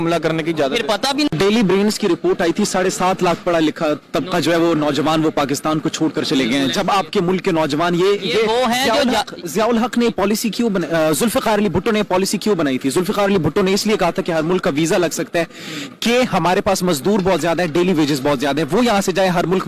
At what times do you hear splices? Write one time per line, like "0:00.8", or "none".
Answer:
0:01.3